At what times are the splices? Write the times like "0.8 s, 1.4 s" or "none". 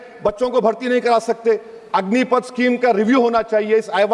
none